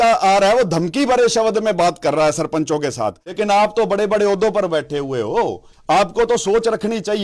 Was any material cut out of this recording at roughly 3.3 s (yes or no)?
yes